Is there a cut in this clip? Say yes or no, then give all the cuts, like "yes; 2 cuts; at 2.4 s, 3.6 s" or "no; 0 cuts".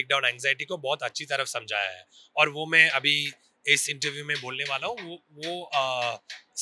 no; 0 cuts